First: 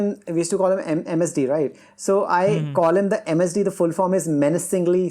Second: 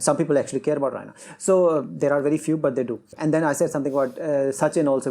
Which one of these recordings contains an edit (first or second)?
second